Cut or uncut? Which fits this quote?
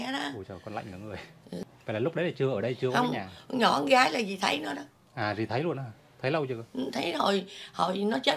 cut